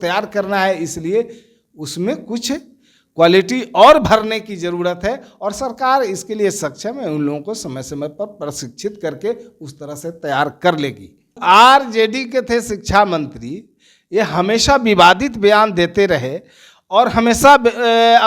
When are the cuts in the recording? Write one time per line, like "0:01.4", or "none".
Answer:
0:11.3